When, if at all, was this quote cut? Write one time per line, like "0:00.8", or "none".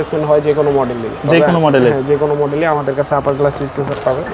none